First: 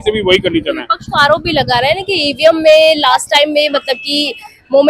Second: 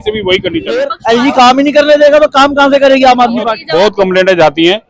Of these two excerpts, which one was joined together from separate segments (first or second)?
second